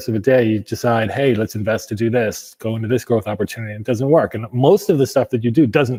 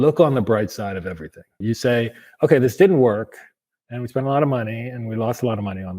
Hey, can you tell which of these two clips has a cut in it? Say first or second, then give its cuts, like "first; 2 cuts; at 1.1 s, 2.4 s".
second; 1 cut; at 1.6 s